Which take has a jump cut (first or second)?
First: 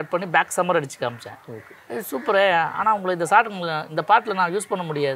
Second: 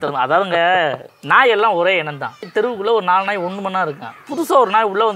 second